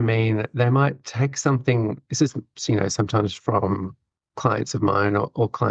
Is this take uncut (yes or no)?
yes